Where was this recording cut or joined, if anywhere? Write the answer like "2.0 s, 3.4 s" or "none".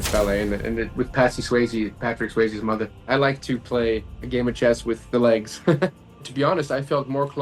3.1 s, 5.9 s